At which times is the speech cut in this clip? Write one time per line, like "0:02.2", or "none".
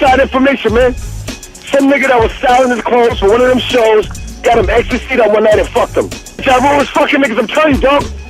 none